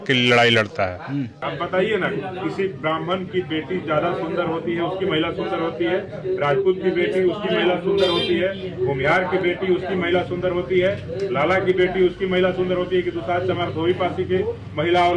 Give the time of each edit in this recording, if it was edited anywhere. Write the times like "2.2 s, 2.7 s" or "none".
1.3 s